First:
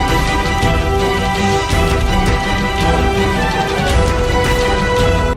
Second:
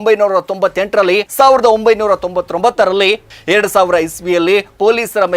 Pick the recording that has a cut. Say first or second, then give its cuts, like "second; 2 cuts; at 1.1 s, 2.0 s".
second; 2 cuts; at 1.3 s, 3.3 s